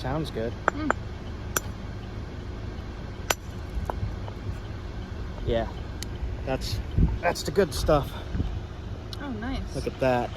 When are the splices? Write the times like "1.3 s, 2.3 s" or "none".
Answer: 7.2 s